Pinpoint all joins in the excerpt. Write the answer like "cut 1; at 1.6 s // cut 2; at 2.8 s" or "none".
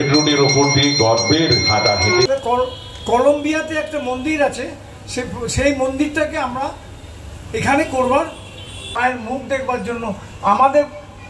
cut 1; at 2.3 s // cut 2; at 8.9 s